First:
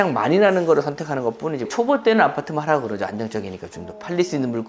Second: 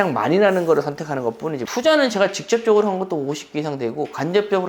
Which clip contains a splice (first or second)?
second